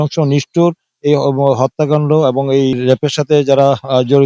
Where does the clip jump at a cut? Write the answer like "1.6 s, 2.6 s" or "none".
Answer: 2.8 s